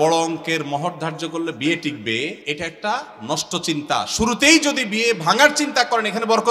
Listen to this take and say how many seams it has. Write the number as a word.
one